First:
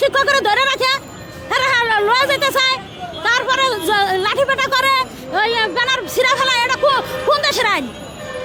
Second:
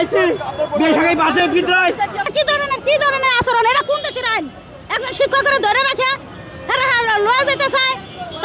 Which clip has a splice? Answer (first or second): second